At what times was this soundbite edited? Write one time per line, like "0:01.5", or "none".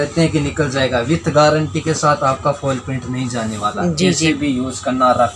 none